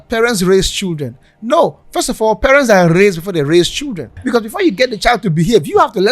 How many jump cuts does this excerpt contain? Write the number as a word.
one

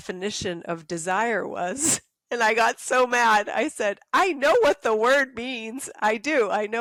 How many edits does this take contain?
zero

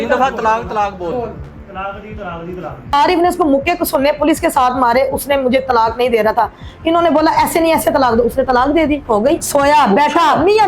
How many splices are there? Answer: two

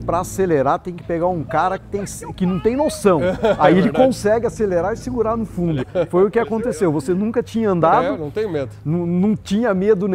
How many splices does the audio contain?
zero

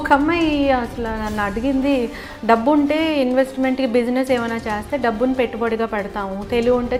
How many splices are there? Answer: zero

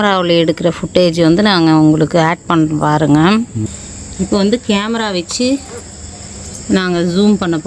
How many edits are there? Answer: one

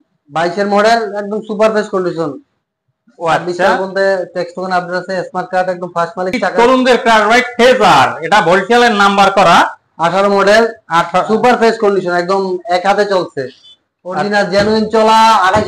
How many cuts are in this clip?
one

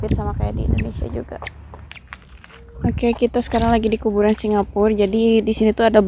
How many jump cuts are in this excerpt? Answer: one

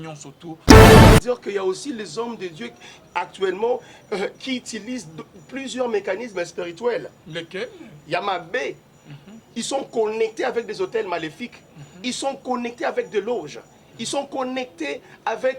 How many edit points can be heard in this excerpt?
one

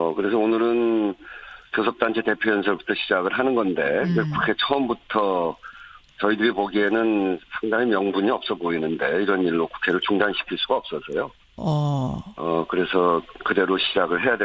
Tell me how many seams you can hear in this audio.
one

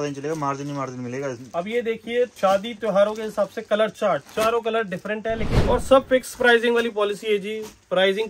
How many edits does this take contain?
three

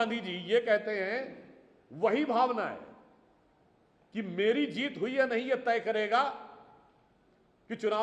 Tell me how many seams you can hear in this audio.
zero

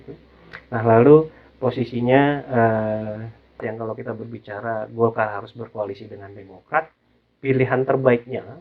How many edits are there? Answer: one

